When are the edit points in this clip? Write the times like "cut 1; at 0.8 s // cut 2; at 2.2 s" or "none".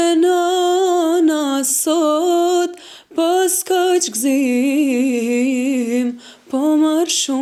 none